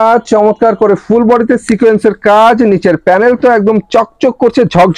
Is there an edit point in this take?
no; 0 cuts

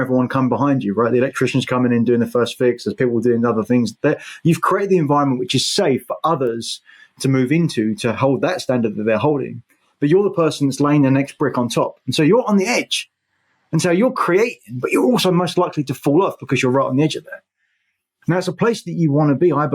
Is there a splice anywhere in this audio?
no; 0 cuts

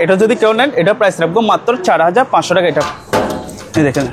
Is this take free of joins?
no; 1 cut; at 2.9 s

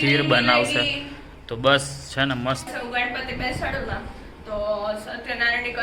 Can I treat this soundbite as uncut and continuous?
no; 1 cut; at 2.6 s

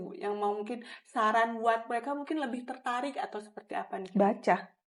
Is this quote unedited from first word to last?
yes; 0 cuts

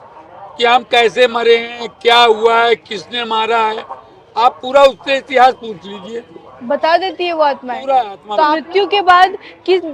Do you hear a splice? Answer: yes; 1 cut; at 8.6 s

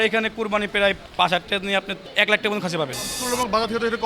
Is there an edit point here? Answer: yes; 3 cuts; at 1.0 s, 2.0 s, 3.1 s

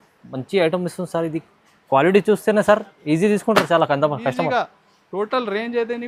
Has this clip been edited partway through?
no; 0 cuts

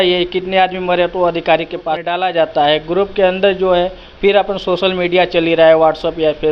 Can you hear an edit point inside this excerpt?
yes; 1 cut; at 1.9 s

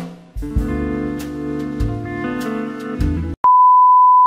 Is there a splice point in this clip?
yes; 1 cut; at 3.4 s

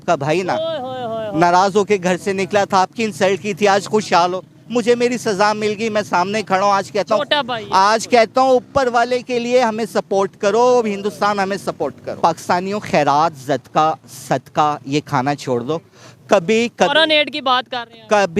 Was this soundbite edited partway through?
yes; 1 cut; at 12.0 s

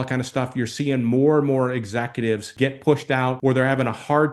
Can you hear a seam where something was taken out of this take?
yes; 2 cuts; at 2.5 s, 3.4 s

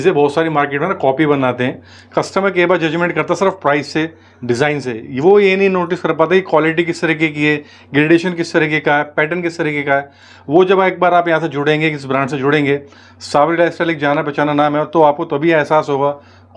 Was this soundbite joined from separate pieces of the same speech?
no; 0 cuts

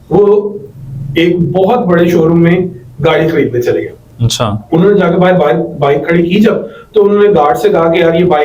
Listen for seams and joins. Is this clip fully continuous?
yes; 0 cuts

